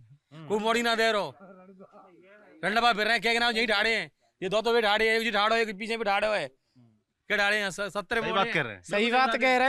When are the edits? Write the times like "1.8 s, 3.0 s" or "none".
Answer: none